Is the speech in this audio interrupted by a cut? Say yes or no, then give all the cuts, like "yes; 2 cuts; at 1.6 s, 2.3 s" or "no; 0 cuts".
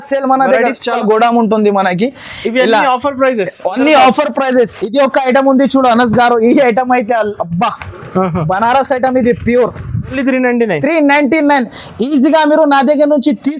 yes; 2 cuts; at 1.0 s, 10.2 s